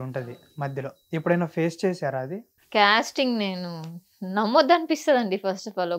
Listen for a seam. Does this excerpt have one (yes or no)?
no